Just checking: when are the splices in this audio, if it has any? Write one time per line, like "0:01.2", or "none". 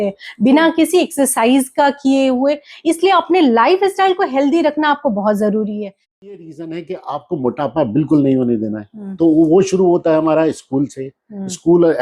0:06.3

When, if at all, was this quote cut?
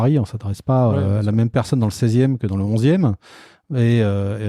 none

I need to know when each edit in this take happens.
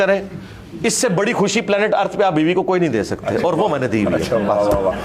none

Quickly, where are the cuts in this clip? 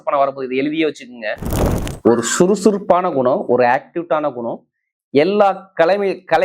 0:01.9

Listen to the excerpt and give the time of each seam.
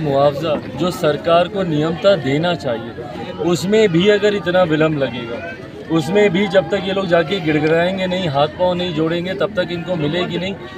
none

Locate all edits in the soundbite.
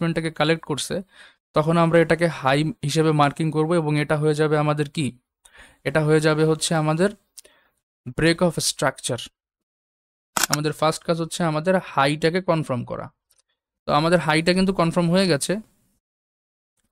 0:10.3

